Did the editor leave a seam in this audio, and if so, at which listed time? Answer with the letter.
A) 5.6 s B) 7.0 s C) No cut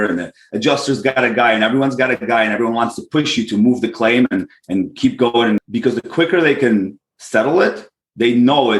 A